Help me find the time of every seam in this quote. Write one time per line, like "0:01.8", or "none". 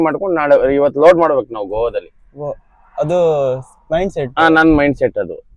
none